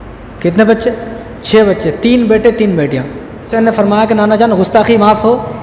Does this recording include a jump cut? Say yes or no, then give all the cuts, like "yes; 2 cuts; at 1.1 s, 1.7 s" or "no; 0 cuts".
yes; 1 cut; at 3.5 s